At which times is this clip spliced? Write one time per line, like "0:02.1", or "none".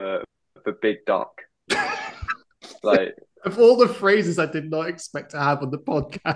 none